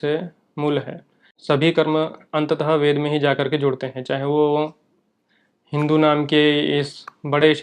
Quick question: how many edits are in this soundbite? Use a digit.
1